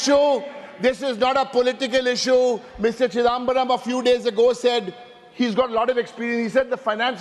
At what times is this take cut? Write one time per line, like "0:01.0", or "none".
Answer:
none